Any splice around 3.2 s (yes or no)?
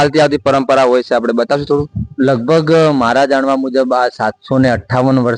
no